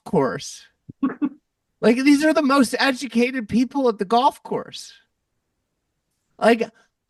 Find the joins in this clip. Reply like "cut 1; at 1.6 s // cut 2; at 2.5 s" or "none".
none